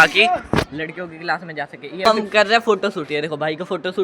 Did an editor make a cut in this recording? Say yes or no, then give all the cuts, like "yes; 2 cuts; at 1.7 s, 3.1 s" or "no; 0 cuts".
yes; 1 cut; at 2.0 s